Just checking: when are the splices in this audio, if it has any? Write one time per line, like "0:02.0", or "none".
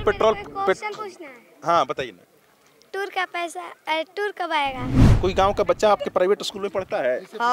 0:05.0